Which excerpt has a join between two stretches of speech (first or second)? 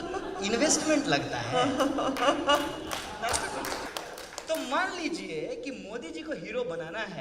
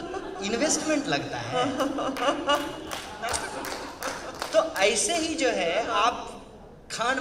first